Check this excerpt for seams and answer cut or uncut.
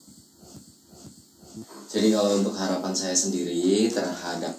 cut